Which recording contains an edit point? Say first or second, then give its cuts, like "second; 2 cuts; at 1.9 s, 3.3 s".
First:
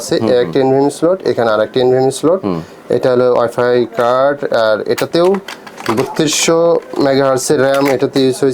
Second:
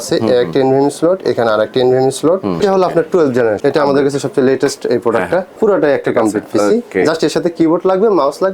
second; 3 cuts; at 2.6 s, 3.6 s, 5.5 s